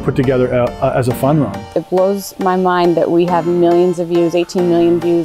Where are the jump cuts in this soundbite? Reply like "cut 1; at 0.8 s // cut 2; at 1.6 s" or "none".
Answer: cut 1; at 1.7 s